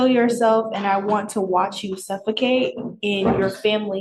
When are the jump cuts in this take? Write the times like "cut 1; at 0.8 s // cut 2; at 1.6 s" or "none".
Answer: none